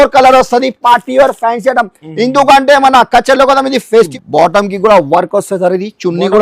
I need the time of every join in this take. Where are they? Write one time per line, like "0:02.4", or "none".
0:04.1